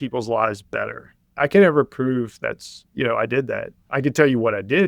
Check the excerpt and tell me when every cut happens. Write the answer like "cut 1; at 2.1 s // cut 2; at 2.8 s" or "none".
cut 1; at 1.3 s